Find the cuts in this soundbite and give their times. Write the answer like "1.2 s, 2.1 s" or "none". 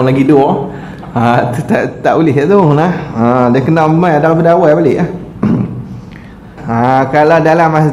6.6 s